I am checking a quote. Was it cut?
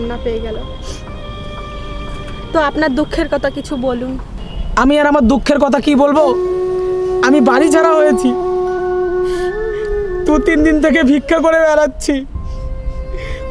no; 0 cuts

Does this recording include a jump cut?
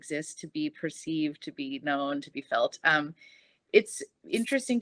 no; 0 cuts

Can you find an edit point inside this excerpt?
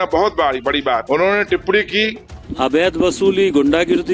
yes; 2 cuts; at 1.0 s, 2.5 s

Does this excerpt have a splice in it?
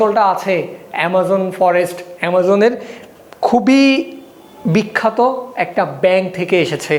no; 0 cuts

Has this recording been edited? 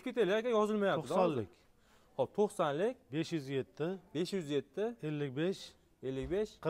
no; 0 cuts

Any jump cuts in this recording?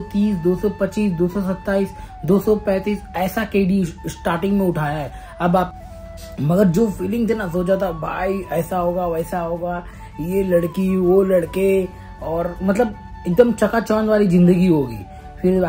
yes; 1 cut; at 5.8 s

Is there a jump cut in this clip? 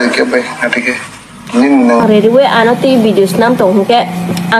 yes; 1 cut; at 2.0 s

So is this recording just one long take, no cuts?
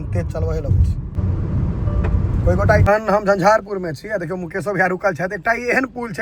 no; 2 cuts; at 1.2 s, 2.8 s

